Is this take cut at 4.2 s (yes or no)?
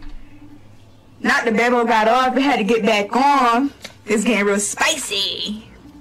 yes